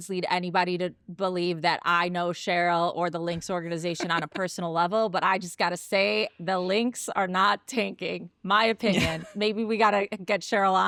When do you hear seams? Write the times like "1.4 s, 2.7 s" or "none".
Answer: none